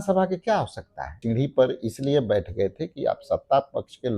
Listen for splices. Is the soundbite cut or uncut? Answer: cut